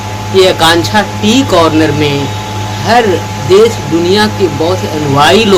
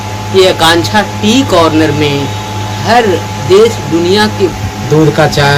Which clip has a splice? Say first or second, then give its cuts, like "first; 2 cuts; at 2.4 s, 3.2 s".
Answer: second; 1 cut; at 4.6 s